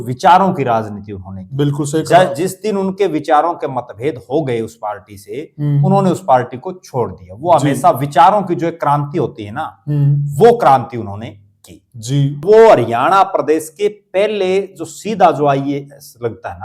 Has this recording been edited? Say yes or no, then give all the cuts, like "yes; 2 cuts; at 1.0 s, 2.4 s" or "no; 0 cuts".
yes; 1 cut; at 12.4 s